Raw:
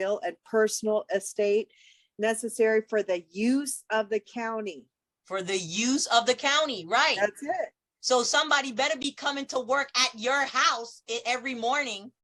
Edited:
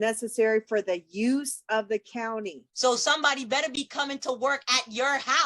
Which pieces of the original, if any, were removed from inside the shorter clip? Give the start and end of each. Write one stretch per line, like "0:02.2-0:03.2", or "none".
0:04.8-0:07.9